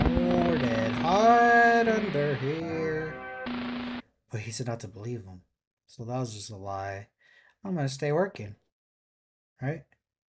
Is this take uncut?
yes; 0 cuts

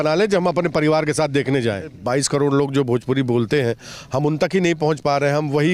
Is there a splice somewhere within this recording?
yes; 1 cut; at 2.0 s

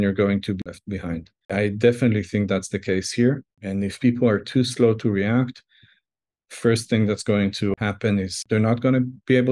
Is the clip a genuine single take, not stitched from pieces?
yes; 0 cuts

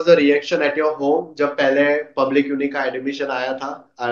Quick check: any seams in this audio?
no; 0 cuts

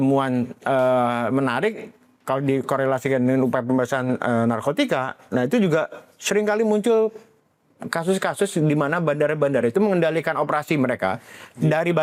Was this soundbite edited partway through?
no; 0 cuts

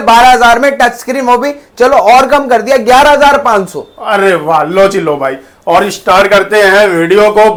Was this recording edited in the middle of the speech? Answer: no; 0 cuts

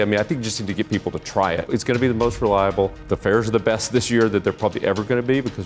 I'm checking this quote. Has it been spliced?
yes; 2 cuts; at 1.7 s, 3.0 s

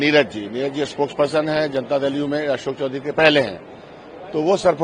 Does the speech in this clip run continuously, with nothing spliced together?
yes; 0 cuts

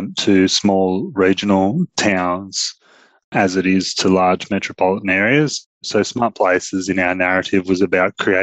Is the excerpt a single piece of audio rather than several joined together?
no; 1 cut; at 5.8 s

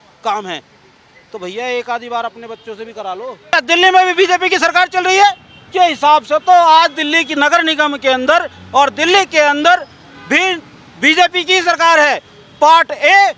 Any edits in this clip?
yes; 2 cuts; at 3.5 s, 5.5 s

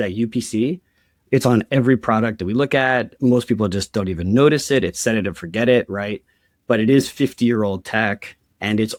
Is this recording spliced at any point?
no; 0 cuts

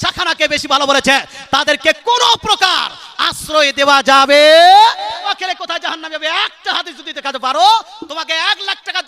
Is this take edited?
yes; 1 cut; at 5.2 s

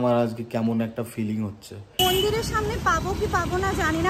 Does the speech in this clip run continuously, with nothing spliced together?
no; 1 cut; at 1.9 s

